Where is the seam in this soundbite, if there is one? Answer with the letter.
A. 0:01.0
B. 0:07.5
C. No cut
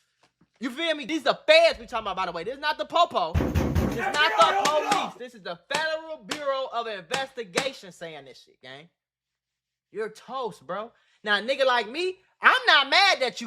A